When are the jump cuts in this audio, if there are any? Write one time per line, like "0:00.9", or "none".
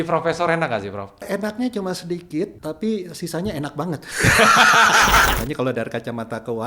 0:01.2
0:02.6
0:05.3